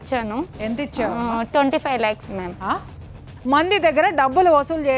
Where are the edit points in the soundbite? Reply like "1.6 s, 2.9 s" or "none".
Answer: 3.0 s